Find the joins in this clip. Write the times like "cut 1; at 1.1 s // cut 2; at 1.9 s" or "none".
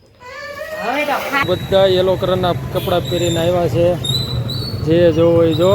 cut 1; at 1.5 s